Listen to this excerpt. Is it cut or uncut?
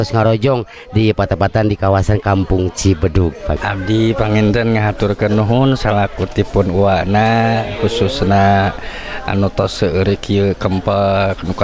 cut